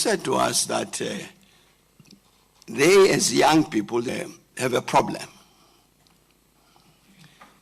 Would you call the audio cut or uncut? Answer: cut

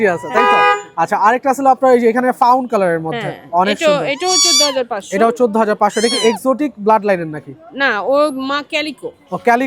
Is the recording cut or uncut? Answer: uncut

